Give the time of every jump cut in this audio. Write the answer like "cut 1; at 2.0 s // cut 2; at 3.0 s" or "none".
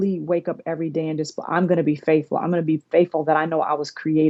none